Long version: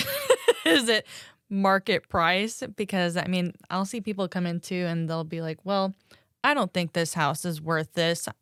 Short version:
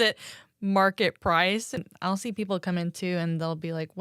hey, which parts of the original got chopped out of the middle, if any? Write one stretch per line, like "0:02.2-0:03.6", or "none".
0:02.7-0:03.5